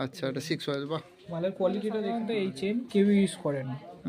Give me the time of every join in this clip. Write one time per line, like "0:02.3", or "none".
0:02.3